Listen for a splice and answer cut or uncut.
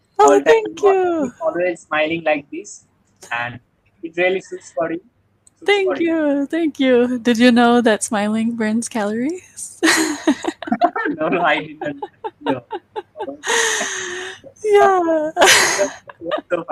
uncut